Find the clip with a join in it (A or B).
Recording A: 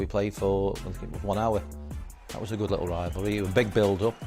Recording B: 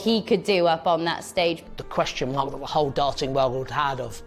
B